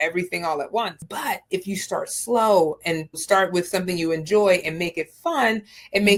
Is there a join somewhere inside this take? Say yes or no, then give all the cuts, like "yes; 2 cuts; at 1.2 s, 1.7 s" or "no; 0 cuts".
no; 0 cuts